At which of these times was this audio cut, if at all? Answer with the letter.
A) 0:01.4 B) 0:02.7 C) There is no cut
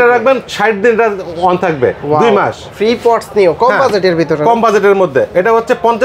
B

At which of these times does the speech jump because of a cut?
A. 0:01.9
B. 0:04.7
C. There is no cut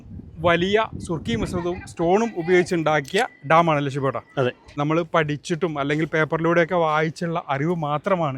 B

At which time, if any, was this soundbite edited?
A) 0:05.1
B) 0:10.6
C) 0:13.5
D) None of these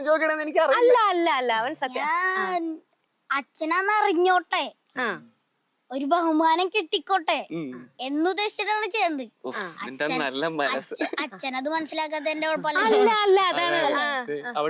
D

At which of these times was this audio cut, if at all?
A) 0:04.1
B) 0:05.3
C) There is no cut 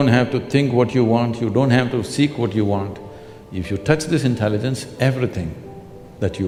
C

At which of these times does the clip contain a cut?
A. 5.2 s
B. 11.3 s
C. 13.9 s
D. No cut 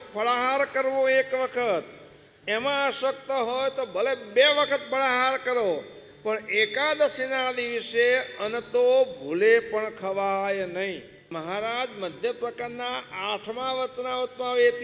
B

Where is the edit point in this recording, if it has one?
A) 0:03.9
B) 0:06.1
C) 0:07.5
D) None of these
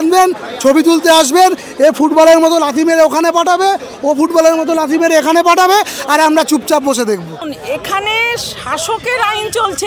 C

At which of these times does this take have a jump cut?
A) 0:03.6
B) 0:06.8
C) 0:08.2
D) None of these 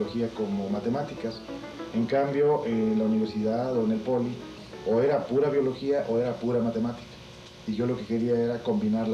A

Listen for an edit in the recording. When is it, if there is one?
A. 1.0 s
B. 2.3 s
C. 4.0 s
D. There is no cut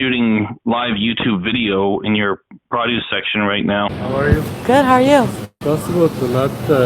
C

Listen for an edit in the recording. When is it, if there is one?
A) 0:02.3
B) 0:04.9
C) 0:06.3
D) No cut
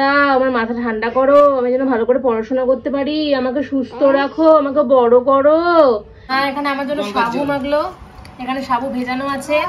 C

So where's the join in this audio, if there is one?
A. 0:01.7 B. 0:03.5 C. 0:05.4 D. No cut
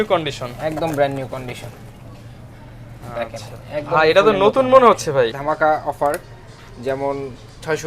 C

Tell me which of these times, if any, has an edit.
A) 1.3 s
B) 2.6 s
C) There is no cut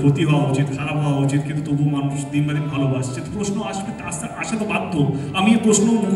C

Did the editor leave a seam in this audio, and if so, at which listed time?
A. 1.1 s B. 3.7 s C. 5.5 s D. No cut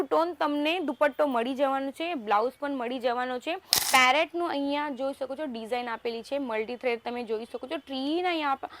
B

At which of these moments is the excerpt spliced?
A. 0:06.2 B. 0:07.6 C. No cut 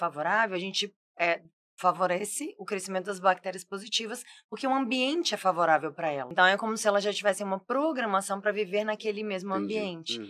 A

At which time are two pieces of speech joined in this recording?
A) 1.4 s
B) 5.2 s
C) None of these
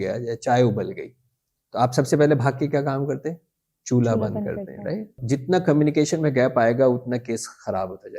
B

